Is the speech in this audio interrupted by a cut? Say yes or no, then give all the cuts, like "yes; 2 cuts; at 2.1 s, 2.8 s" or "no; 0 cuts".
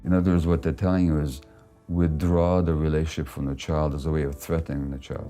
no; 0 cuts